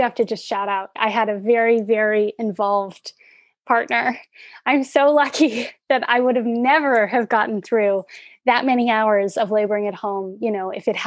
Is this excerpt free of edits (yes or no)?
no